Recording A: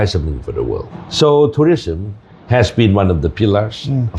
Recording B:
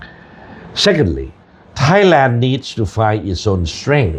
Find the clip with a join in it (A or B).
A